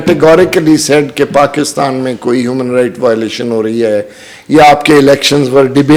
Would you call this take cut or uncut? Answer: uncut